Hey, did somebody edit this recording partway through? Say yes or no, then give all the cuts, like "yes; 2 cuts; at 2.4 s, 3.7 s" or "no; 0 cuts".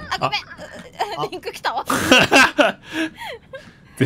no; 0 cuts